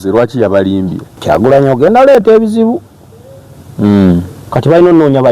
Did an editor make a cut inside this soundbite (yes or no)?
yes